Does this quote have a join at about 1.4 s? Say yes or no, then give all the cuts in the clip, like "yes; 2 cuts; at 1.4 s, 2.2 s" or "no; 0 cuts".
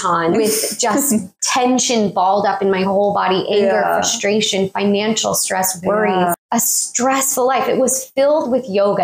yes; 2 cuts; at 1.4 s, 6.4 s